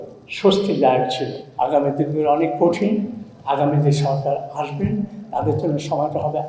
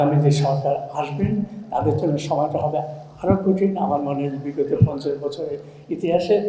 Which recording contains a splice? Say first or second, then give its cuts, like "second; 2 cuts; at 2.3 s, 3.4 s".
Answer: first; 1 cut; at 1.4 s